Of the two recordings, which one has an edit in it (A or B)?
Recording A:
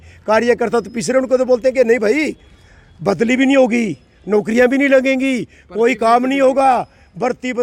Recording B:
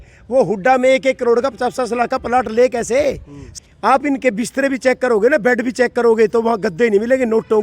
B